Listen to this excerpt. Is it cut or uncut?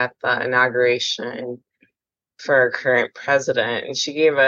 uncut